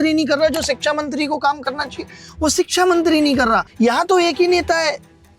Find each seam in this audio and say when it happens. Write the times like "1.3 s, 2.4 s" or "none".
3.7 s